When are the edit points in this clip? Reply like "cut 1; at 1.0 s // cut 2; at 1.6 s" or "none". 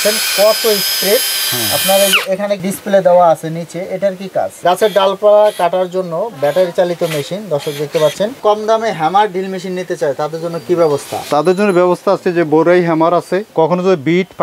cut 1; at 4.6 s // cut 2; at 8.4 s // cut 3; at 13.4 s